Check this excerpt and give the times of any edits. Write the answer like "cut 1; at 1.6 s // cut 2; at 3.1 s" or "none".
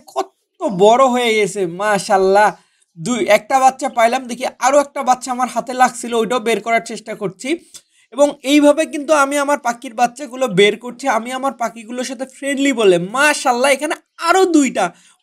none